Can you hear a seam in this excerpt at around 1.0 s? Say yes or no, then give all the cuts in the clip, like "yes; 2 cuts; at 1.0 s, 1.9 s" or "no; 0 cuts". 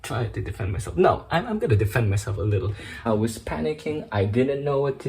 no; 1 cut; at 3.0 s